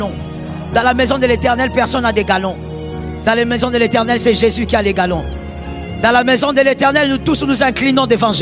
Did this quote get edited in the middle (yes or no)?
no